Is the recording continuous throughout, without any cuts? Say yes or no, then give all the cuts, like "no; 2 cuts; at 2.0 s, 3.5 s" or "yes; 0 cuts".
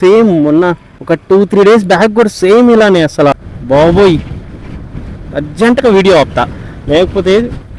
no; 2 cuts; at 0.9 s, 3.3 s